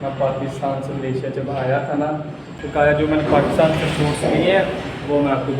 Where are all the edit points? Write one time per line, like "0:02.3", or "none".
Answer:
0:02.5